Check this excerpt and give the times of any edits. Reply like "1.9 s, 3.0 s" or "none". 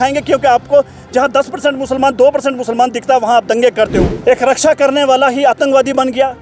4.1 s

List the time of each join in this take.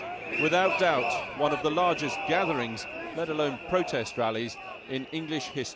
none

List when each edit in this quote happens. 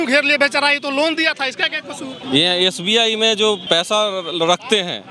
2.2 s, 3.7 s

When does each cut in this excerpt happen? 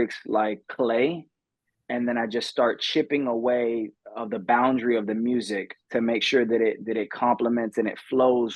none

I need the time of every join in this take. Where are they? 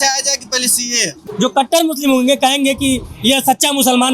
1.2 s

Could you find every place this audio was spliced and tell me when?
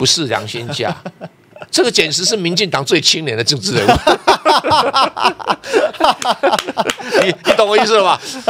none

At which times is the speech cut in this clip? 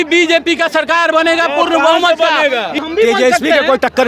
2.8 s

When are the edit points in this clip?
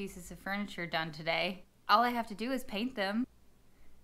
1.7 s, 3.2 s

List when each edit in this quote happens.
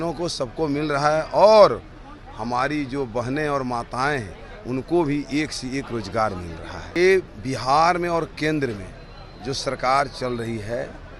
6.9 s

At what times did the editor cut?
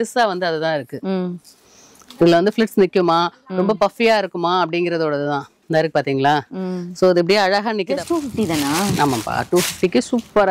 8.0 s

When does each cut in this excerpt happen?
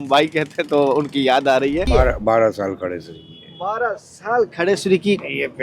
1.9 s

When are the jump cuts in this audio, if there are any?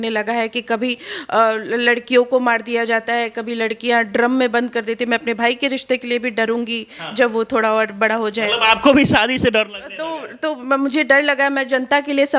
none

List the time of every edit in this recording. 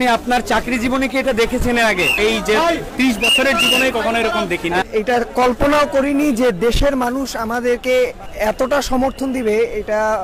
2.1 s, 4.9 s, 8.2 s

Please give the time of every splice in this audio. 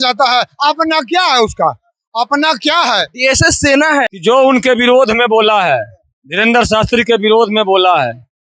4.1 s

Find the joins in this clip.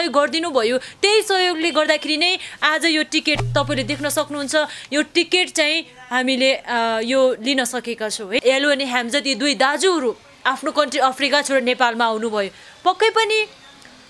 8.4 s

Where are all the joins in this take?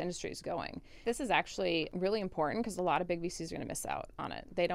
1.0 s, 1.9 s

